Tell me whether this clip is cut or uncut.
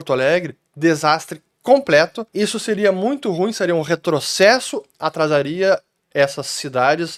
uncut